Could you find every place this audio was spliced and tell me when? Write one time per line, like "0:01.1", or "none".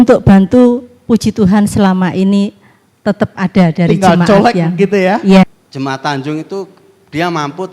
0:05.4